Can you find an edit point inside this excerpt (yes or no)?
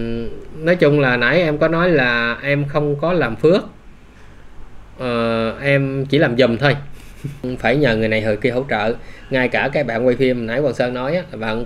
yes